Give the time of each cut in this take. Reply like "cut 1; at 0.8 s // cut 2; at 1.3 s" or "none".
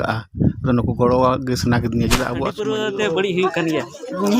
cut 1; at 2.5 s